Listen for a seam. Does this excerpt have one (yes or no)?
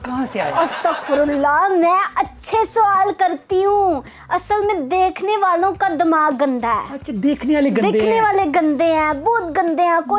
no